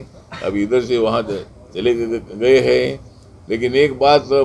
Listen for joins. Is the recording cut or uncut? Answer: uncut